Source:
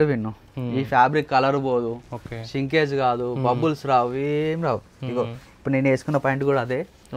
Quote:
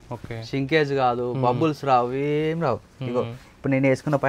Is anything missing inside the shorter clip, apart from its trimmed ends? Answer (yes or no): no